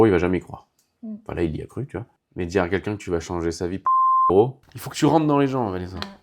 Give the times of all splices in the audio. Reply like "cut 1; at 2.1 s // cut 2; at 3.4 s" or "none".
cut 1; at 4.7 s

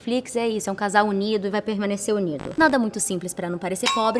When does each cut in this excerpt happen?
cut 1; at 2.4 s

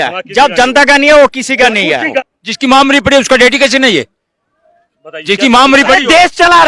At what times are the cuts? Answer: cut 1; at 2.2 s

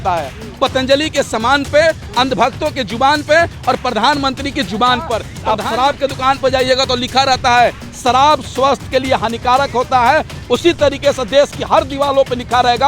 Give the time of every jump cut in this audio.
cut 1; at 5.3 s

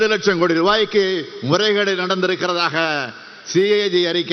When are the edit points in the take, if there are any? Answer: none

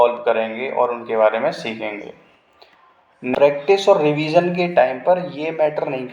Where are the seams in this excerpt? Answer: cut 1; at 3.3 s

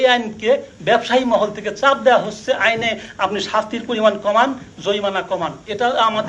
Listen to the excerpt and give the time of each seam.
none

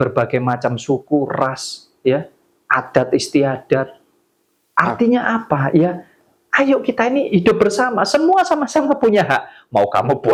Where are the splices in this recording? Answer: none

